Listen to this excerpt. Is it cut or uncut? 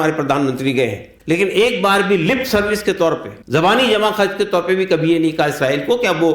cut